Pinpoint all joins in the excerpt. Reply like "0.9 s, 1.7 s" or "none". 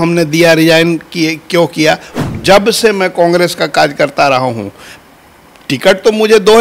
2.1 s